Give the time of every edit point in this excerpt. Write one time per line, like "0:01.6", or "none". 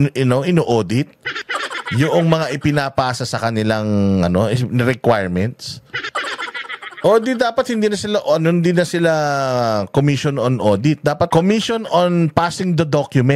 0:11.3